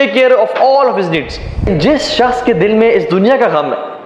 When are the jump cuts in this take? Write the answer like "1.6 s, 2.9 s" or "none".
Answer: 1.7 s